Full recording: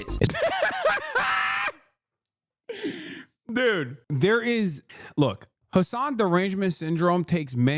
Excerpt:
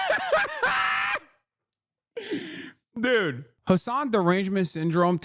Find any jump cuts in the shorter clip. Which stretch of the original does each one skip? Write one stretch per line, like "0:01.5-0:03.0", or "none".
0:04.0-0:05.5